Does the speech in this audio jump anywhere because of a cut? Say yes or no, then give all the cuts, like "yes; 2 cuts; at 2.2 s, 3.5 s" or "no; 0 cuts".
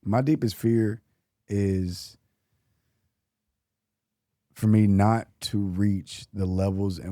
no; 0 cuts